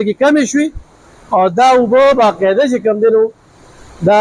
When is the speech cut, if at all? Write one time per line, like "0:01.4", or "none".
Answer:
none